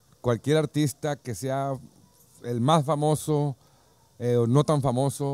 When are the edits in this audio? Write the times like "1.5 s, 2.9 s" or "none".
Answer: none